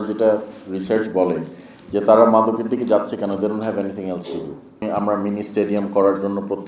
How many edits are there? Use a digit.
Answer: 1